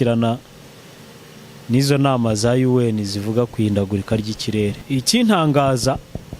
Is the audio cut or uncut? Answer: cut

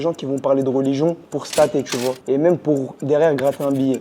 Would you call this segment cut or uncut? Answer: cut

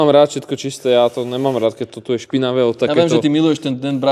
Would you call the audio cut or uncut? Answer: uncut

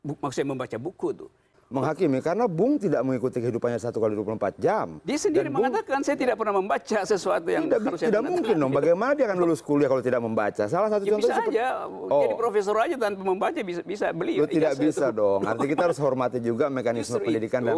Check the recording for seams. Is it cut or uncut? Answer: cut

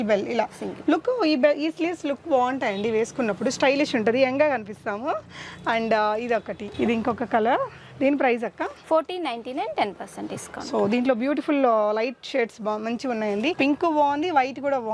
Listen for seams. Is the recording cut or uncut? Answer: uncut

